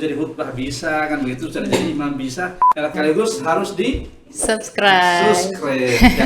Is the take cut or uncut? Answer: cut